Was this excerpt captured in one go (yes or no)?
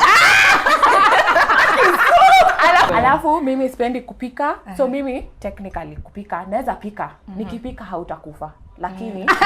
no